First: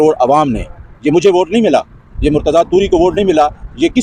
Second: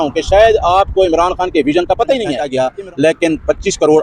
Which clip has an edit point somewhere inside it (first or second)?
second